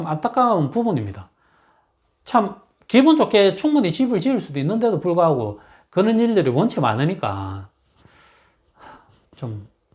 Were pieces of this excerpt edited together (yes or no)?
no